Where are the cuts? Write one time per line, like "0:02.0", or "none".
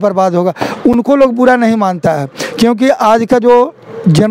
none